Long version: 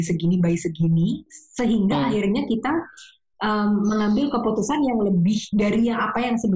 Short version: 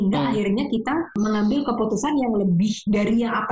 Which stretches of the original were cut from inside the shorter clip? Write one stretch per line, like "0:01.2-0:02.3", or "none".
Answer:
0:02.9-0:03.8